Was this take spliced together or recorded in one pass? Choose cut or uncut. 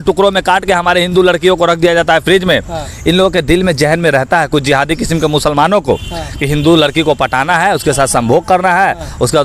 uncut